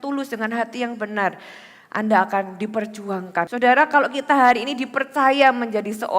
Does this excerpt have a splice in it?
yes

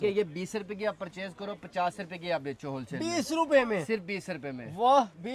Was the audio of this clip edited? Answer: no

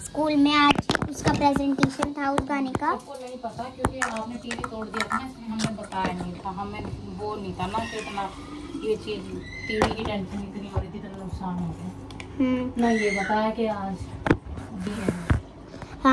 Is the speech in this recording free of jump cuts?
yes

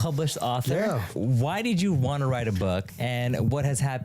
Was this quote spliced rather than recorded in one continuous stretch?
yes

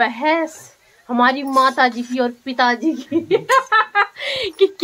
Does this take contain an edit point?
no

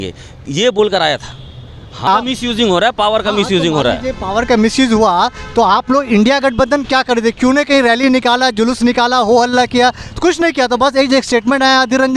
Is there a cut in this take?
yes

